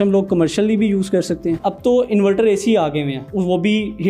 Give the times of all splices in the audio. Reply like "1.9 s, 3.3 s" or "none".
1.6 s, 3.2 s